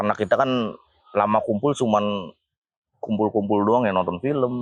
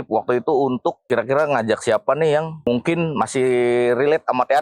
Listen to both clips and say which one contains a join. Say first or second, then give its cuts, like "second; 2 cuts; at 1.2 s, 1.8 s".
second; 2 cuts; at 1.0 s, 2.7 s